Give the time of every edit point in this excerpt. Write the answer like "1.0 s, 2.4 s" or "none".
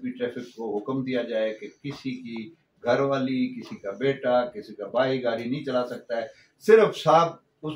none